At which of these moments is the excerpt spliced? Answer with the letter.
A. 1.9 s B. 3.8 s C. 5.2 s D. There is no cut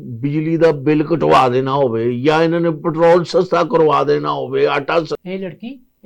C